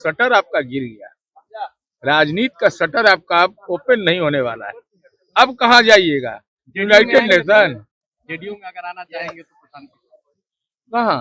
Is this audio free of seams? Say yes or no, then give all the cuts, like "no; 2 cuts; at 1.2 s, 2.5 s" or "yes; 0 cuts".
yes; 0 cuts